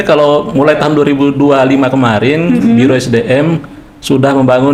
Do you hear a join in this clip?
no; 0 cuts

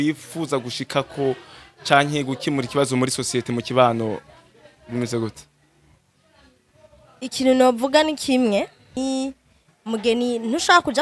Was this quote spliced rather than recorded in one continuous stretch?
yes; 1 cut; at 9.0 s

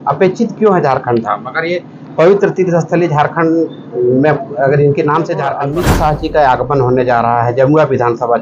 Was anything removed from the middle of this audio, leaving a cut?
yes; 1 cut; at 5.6 s

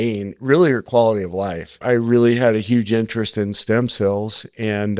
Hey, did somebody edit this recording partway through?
yes; 1 cut; at 1.8 s

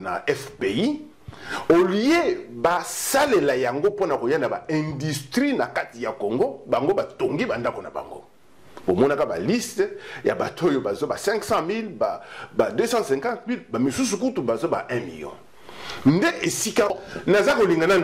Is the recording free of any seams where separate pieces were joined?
no; 1 cut; at 16.9 s

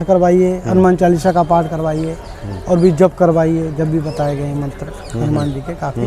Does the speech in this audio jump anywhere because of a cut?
no; 0 cuts

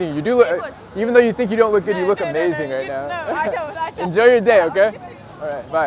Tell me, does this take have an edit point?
no; 0 cuts

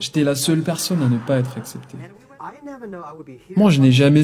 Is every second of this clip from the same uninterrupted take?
no; 1 cut; at 2.1 s

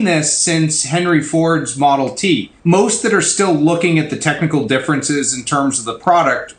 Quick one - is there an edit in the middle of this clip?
yes; 1 cut; at 2.5 s

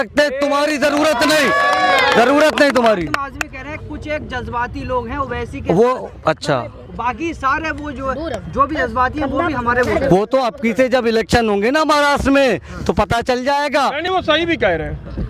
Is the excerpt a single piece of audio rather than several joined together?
yes; 0 cuts

